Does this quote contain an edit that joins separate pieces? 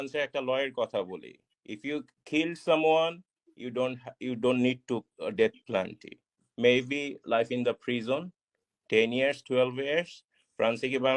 no; 0 cuts

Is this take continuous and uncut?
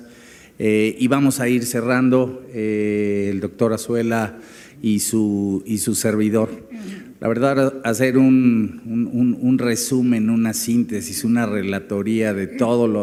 yes; 0 cuts

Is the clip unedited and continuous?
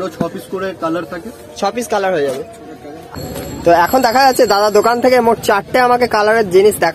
no; 1 cut; at 2.9 s

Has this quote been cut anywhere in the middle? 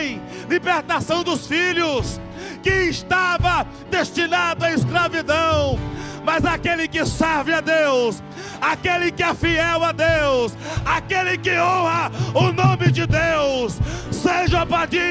no; 0 cuts

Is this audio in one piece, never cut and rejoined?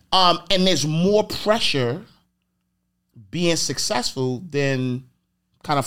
yes; 0 cuts

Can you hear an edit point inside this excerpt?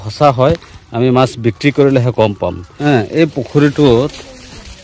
yes; 1 cut; at 2.7 s

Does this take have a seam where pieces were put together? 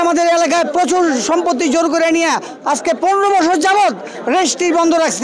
no; 0 cuts

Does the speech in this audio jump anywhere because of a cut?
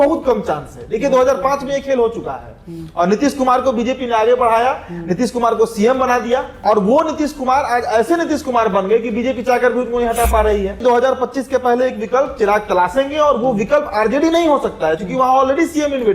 yes; 2 cuts; at 6.5 s, 10.8 s

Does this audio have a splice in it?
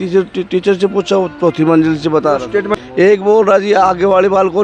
yes; 1 cut; at 2.8 s

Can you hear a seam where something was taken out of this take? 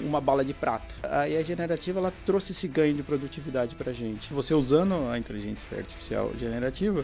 yes; 2 cuts; at 1.1 s, 4.3 s

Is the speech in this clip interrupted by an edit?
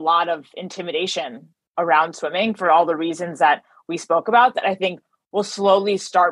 no; 0 cuts

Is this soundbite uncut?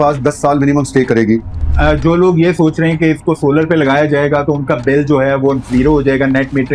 no; 1 cut; at 1.7 s

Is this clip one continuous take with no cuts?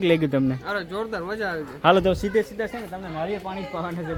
yes; 0 cuts

